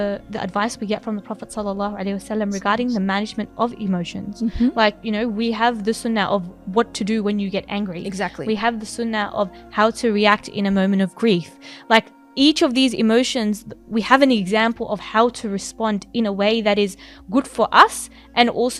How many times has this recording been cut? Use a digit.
0